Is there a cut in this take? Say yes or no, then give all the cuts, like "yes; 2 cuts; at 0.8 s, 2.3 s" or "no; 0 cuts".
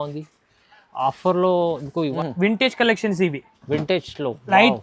yes; 1 cut; at 2.1 s